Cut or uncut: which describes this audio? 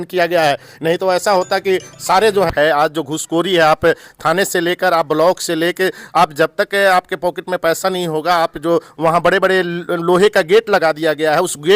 cut